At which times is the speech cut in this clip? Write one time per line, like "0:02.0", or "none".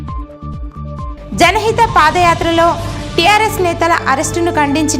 0:01.2